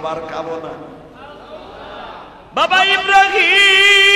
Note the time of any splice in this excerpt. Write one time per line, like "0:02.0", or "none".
0:02.5